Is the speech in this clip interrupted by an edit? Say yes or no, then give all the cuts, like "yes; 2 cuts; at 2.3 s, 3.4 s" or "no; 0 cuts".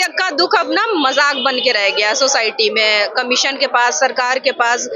no; 0 cuts